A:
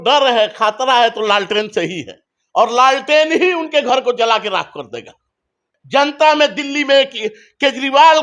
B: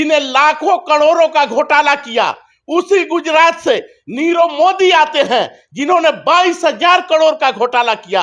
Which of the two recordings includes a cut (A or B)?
A